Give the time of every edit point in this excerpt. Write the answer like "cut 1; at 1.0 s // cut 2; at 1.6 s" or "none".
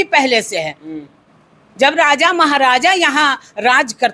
none